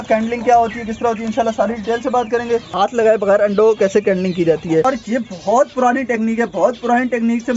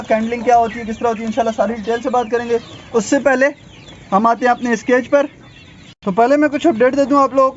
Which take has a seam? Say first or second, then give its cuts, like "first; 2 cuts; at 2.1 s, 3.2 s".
first; 2 cuts; at 2.8 s, 4.9 s